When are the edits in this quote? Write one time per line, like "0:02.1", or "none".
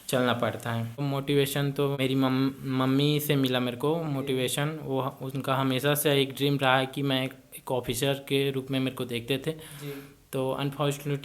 0:01.0
0:02.0